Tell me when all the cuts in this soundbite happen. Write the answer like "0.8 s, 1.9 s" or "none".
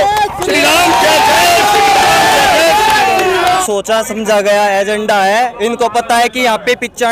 3.6 s